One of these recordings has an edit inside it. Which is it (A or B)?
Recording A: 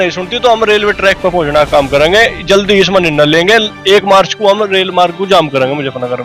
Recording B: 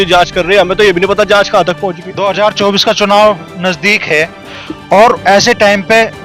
B